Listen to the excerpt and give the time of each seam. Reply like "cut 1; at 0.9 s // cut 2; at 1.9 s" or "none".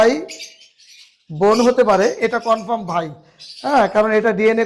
none

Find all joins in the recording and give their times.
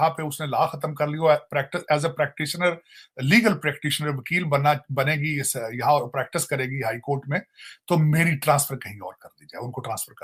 none

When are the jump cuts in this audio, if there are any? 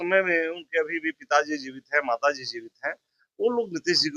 none

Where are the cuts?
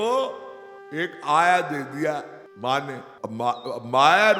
cut 1; at 2.4 s // cut 2; at 3.1 s

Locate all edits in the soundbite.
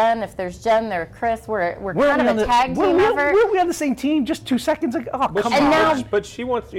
none

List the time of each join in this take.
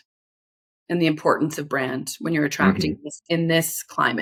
none

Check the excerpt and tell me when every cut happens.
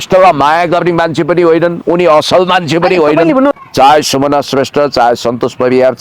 cut 1; at 3.6 s

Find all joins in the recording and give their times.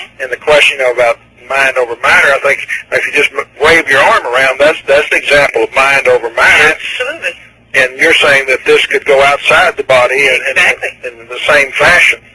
cut 1; at 9.6 s

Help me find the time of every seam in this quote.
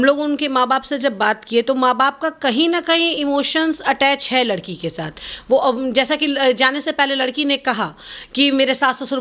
none

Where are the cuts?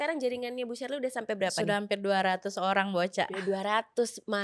none

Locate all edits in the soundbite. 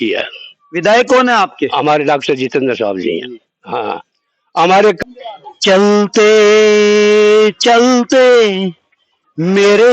cut 1; at 5.0 s

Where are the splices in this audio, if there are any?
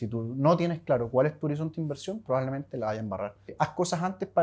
cut 1; at 3.5 s

